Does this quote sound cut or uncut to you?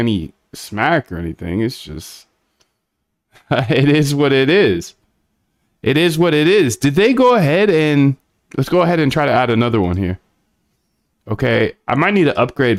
uncut